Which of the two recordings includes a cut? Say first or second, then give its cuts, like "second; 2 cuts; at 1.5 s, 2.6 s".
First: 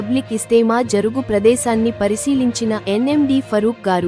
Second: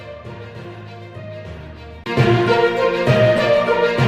second; 2 cuts; at 0.9 s, 2.0 s